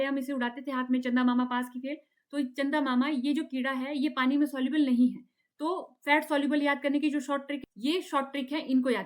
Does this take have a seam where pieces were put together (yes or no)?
yes